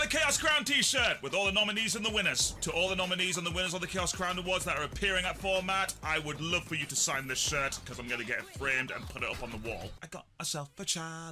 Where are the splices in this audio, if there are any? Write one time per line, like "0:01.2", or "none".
none